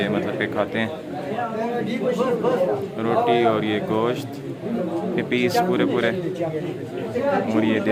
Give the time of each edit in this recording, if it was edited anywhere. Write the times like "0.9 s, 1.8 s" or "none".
none